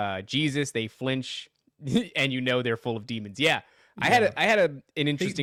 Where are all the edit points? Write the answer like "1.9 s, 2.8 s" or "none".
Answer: none